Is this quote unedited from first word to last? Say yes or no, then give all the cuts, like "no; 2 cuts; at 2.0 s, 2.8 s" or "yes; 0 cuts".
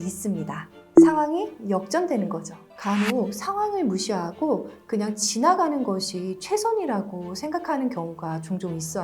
no; 1 cut; at 2.5 s